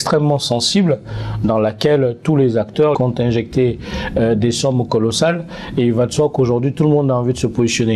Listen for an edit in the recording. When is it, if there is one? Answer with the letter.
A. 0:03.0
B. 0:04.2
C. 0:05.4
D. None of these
A